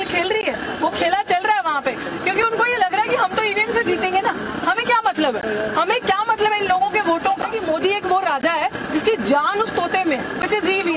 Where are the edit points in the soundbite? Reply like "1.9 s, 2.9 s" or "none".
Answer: 2.0 s, 7.5 s